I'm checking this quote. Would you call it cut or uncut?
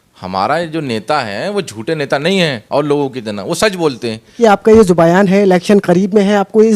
cut